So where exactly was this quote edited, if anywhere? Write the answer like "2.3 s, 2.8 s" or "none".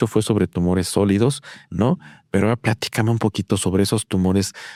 none